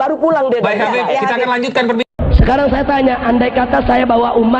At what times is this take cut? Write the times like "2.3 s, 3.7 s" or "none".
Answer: 2.2 s

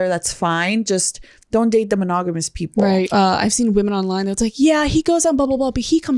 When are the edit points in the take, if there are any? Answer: 3.1 s

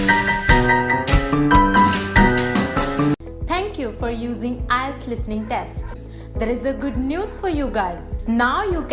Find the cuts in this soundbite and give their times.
3.1 s

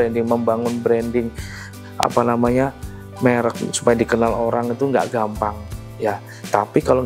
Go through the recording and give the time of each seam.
none

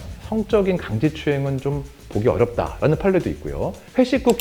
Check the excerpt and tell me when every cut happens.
none

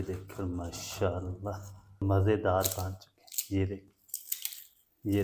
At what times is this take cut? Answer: 2.0 s

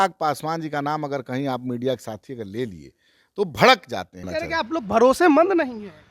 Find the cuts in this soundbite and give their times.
4.3 s

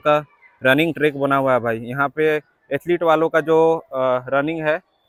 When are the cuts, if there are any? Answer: none

